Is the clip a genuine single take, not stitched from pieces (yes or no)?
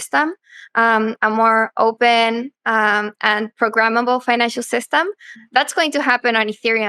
no